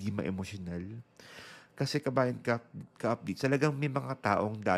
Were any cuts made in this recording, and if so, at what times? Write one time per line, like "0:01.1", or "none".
none